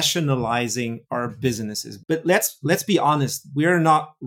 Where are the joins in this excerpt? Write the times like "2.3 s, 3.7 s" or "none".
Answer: 1.0 s, 1.9 s

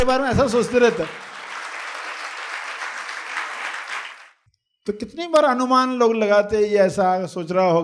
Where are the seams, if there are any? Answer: 4.2 s

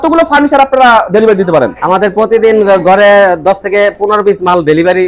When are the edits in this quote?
none

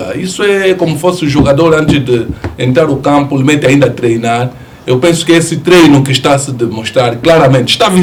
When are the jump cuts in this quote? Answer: none

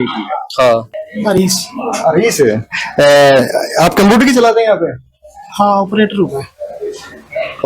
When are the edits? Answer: 1.0 s

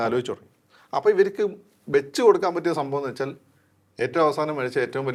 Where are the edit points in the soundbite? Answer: none

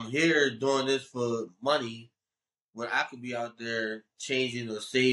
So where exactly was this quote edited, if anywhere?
none

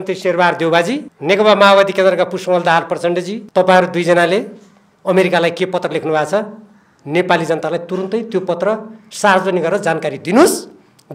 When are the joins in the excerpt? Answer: 1.1 s, 3.4 s

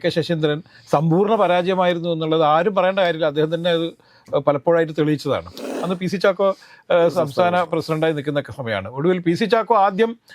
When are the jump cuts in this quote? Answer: 5.8 s

